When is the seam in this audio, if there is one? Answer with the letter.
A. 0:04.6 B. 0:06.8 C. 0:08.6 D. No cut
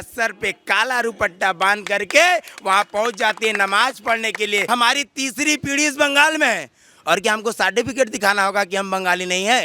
A